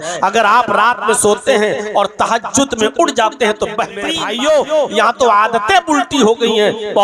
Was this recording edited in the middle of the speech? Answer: yes; 1 cut; at 4.2 s

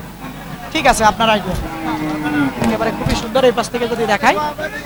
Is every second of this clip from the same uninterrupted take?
yes; 0 cuts

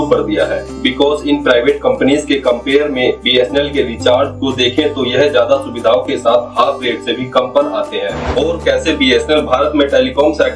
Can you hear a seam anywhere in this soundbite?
yes; 1 cut; at 8.2 s

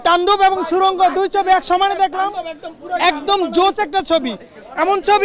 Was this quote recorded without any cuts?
yes; 0 cuts

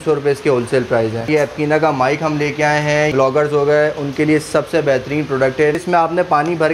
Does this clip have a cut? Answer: yes; 3 cuts; at 1.3 s, 3.1 s, 5.8 s

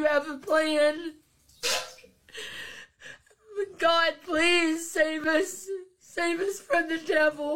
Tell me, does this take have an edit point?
yes; 1 cut; at 4.6 s

